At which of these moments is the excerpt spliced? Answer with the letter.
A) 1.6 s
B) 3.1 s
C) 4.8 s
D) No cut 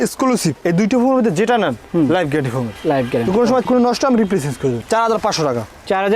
C